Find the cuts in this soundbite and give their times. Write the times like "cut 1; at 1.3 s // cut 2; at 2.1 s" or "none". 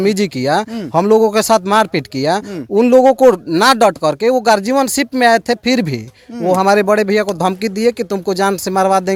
none